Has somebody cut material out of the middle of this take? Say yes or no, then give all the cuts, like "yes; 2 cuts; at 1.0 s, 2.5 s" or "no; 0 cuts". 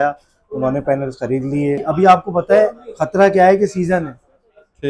yes; 1 cut; at 1.9 s